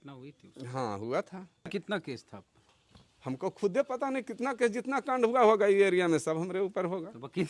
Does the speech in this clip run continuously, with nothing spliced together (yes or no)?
no